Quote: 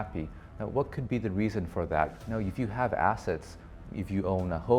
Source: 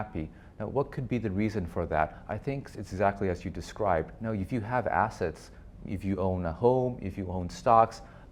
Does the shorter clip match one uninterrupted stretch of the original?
no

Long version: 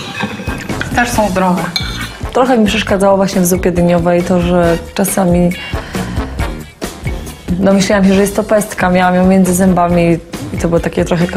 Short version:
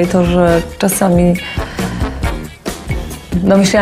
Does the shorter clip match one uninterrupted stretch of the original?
yes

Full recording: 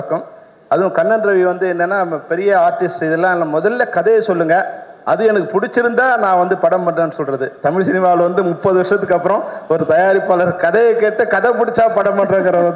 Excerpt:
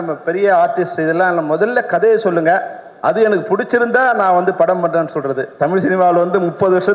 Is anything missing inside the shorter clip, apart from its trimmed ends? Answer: no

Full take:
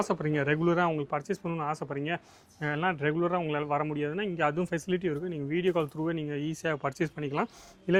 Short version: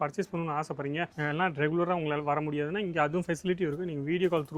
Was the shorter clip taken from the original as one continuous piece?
no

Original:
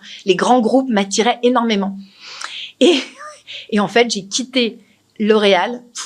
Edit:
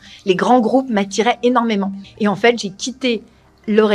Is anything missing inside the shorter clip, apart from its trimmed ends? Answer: yes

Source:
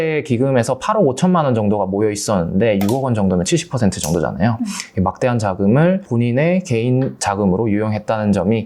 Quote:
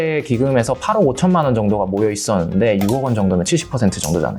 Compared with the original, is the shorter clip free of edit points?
yes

